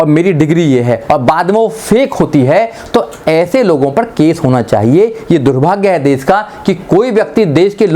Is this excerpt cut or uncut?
uncut